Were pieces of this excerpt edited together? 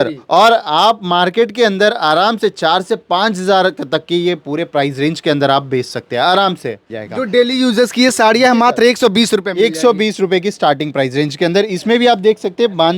yes; 1 cut; at 6.9 s

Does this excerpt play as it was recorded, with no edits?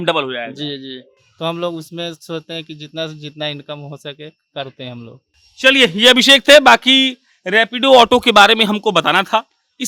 yes; 0 cuts

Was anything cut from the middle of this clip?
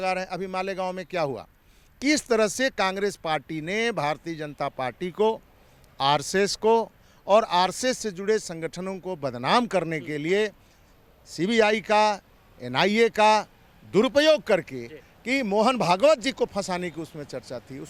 no; 0 cuts

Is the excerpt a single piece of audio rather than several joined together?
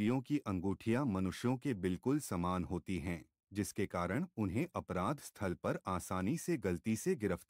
yes; 0 cuts

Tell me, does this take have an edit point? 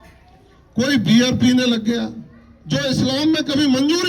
no; 0 cuts

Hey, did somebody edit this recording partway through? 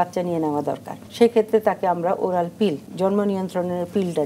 yes; 2 cuts; at 1.0 s, 2.9 s

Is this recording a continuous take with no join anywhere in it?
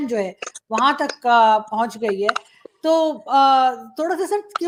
yes; 0 cuts

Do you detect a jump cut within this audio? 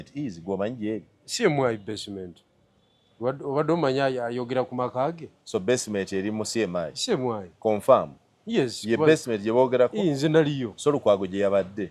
no; 0 cuts

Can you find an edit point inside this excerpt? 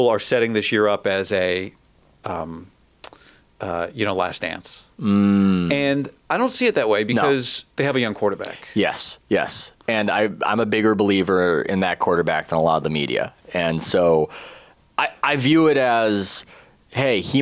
no; 0 cuts

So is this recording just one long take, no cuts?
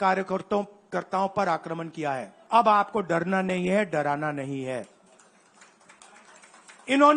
no; 1 cut; at 2.3 s

